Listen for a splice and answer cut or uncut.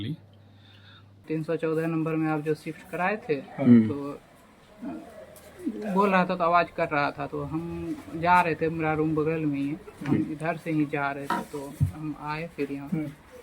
cut